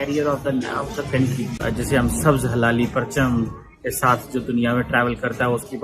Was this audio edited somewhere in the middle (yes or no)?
yes